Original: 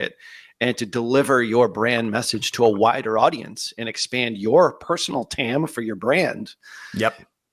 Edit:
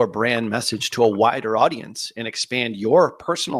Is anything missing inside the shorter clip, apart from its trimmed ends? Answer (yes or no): no